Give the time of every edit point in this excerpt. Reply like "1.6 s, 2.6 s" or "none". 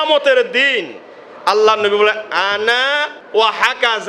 3.1 s

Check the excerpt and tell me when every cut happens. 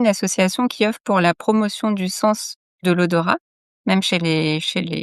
none

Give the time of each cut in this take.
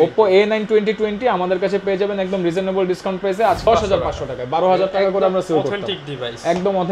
3.7 s

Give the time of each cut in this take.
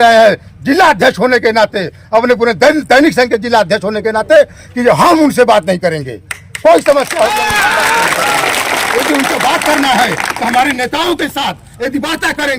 none

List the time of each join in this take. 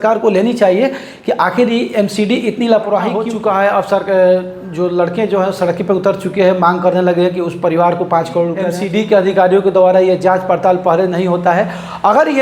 3.3 s, 8.7 s

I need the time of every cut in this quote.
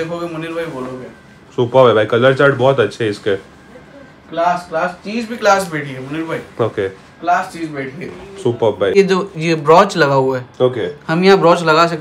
8.9 s

